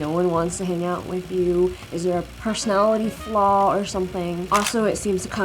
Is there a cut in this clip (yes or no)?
no